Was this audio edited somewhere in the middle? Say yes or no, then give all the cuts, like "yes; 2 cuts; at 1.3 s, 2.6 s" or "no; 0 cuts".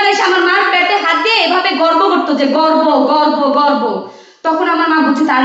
no; 0 cuts